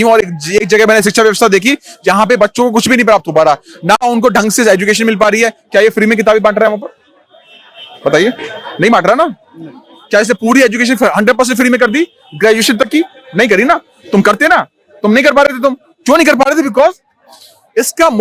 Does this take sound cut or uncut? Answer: uncut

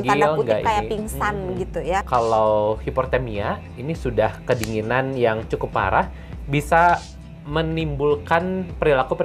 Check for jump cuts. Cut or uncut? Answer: cut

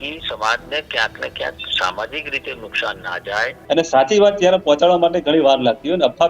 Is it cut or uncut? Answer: cut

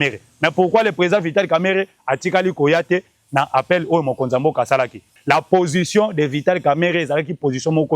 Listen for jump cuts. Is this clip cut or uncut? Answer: cut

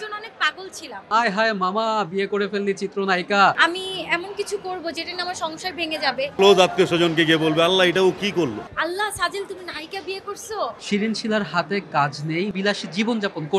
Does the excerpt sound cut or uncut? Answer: cut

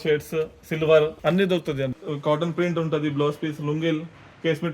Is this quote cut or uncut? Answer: cut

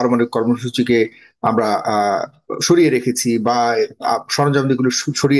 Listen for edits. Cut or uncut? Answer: uncut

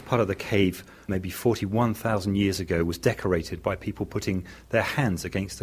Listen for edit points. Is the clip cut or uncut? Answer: cut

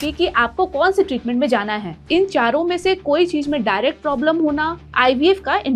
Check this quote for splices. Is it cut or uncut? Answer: cut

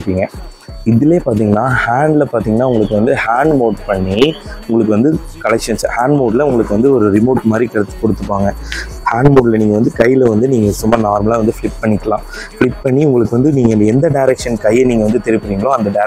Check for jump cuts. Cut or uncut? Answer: uncut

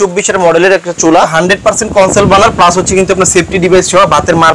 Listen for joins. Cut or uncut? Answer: cut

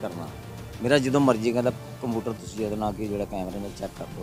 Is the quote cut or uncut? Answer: uncut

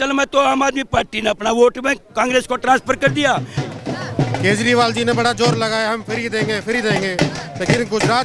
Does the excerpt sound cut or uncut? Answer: cut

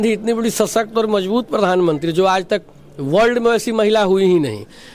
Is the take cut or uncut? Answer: uncut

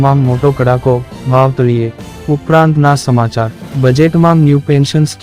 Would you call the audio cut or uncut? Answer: cut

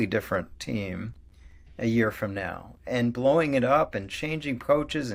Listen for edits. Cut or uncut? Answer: uncut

